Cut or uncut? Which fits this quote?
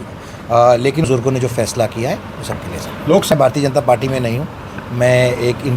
cut